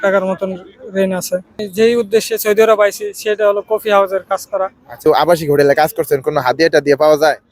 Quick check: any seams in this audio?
yes; 2 cuts; at 1.6 s, 5.0 s

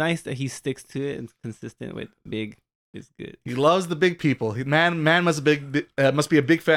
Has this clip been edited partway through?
no; 0 cuts

